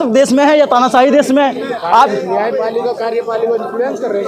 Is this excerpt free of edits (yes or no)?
yes